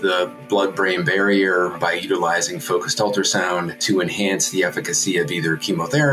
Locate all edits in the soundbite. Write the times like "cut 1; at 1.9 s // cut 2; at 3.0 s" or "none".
cut 1; at 1.8 s // cut 2; at 3.8 s